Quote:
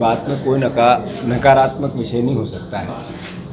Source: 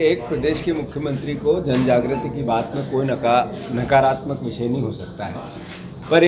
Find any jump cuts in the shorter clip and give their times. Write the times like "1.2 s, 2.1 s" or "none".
none